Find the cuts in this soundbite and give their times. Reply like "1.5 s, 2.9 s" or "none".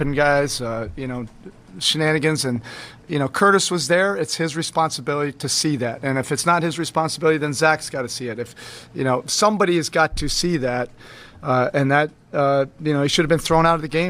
13.1 s